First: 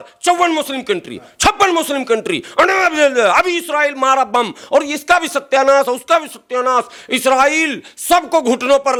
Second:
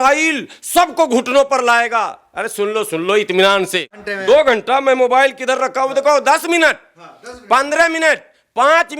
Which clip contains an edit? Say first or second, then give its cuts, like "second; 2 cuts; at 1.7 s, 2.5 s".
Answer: second; 1 cut; at 4.1 s